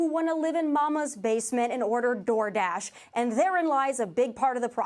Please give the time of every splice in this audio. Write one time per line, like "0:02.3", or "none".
none